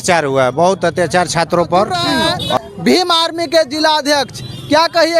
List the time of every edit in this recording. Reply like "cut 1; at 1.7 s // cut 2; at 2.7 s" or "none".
cut 1; at 2.6 s